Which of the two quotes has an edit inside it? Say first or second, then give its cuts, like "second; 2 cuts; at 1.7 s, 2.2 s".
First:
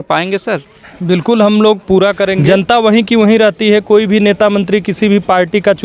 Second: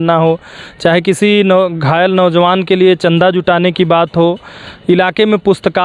first; 1 cut; at 2.4 s